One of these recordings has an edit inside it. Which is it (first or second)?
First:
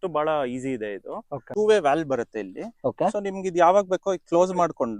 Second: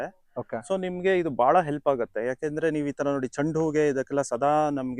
first